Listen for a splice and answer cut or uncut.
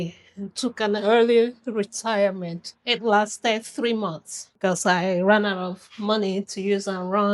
uncut